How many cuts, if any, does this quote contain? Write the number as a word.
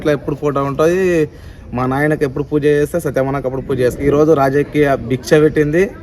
one